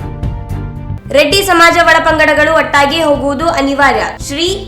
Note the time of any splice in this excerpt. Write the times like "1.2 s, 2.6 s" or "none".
1.0 s